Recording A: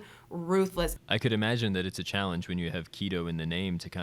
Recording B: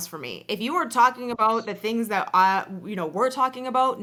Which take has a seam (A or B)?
A